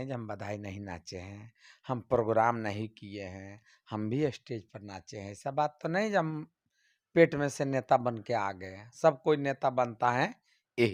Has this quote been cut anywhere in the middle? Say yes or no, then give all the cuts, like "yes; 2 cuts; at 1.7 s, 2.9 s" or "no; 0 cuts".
no; 0 cuts